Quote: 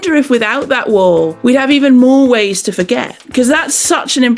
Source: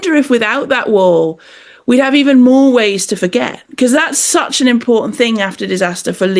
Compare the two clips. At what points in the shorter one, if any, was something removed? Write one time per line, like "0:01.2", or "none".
0:01.3